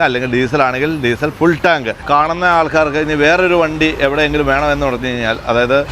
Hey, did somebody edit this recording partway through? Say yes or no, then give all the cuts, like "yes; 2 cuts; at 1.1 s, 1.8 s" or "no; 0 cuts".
yes; 1 cut; at 2.0 s